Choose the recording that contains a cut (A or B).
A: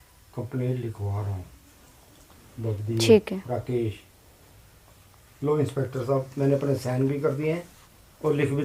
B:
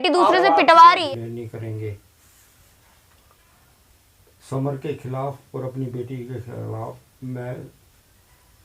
B